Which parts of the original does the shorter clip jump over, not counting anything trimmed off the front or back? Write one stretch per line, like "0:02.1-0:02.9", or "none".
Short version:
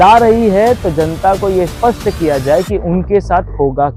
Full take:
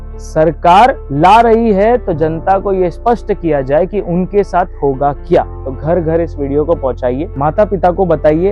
none

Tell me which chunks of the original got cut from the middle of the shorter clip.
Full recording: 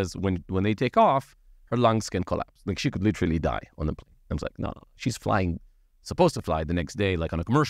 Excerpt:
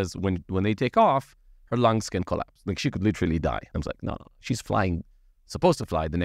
0:03.7-0:04.2

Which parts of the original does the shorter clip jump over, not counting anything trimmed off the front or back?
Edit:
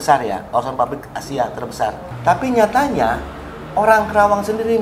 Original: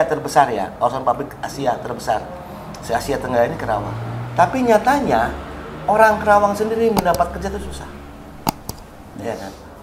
0:02.3-0:04.2

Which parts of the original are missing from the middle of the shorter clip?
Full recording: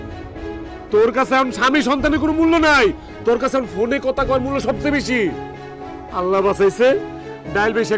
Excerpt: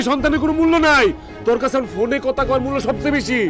none

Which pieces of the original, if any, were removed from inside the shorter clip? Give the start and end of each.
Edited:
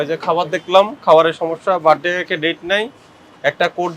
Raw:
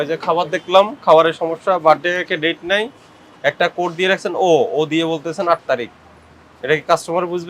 none

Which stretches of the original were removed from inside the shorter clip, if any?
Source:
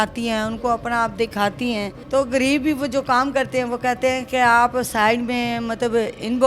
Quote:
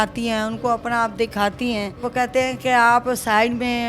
0:02.0-0:03.7

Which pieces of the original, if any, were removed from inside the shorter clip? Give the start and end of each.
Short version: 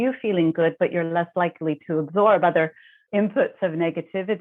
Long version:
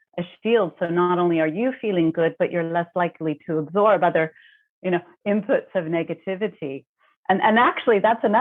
0:04.6-0:05.1

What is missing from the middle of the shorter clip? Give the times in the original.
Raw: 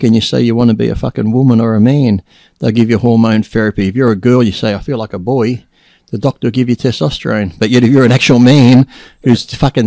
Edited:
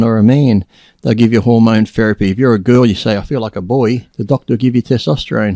0:05.7-0:06.1

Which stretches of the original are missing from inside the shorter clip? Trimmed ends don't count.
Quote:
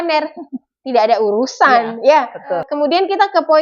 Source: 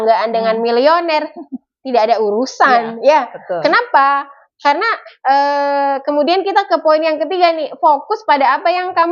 0:03.6-0:05.9

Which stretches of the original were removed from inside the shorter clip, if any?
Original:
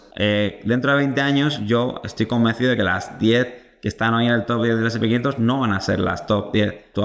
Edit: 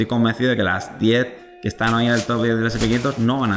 none

